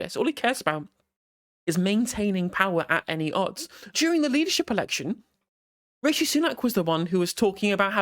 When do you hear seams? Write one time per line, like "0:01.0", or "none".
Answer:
0:03.8